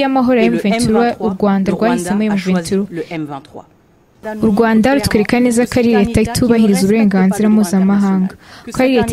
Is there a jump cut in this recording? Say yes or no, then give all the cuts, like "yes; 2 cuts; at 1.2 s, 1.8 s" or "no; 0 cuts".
yes; 1 cut; at 4.2 s